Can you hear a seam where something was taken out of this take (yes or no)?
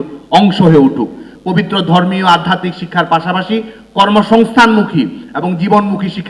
yes